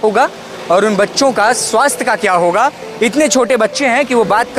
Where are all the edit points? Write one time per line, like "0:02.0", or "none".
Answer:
none